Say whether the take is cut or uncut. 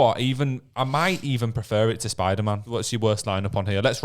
cut